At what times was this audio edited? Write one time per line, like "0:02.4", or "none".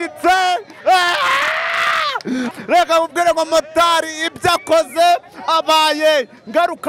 0:02.5